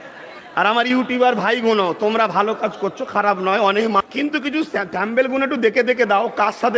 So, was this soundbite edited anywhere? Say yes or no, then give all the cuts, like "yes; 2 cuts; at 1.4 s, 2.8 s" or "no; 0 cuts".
yes; 1 cut; at 4.0 s